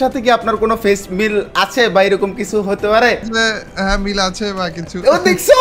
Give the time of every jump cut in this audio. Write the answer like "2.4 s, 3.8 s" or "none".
3.3 s